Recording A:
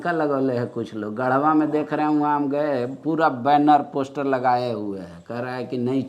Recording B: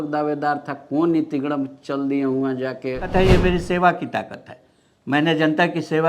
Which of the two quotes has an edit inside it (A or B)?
B